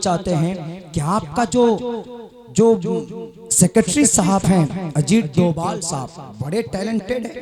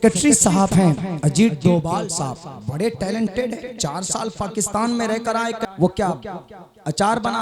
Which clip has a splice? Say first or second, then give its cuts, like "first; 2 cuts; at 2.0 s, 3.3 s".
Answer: second; 1 cut; at 5.6 s